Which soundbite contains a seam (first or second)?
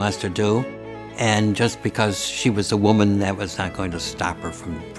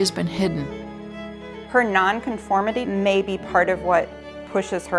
second